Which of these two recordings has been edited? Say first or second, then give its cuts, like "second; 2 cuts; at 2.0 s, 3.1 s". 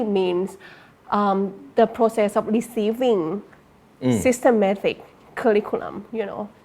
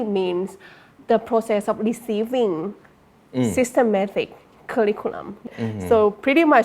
second; 2 cuts; at 0.9 s, 5.5 s